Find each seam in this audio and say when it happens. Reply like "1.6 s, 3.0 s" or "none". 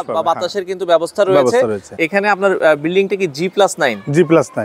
1.9 s